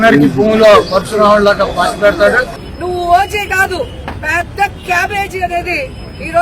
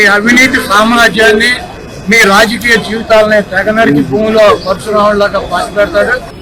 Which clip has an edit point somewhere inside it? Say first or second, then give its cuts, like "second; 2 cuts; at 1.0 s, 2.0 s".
first; 1 cut; at 4.0 s